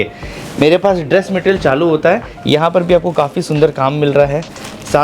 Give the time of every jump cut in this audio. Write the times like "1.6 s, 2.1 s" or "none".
2.3 s